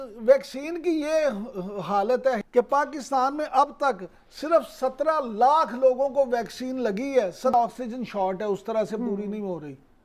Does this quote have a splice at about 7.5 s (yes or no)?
yes